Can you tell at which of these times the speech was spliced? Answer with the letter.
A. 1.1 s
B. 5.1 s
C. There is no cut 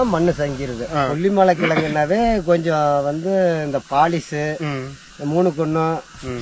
A